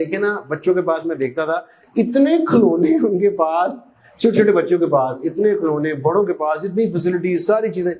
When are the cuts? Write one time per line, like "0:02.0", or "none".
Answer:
none